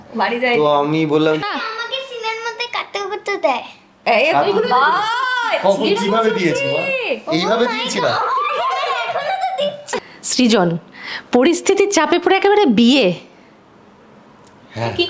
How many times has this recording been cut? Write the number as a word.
two